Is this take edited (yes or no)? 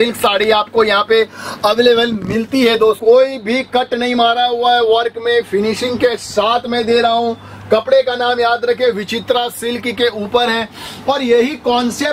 yes